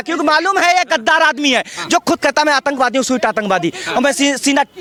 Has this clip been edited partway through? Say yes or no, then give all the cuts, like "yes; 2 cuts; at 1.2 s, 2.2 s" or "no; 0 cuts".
no; 0 cuts